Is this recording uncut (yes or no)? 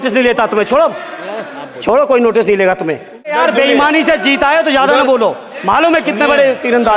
no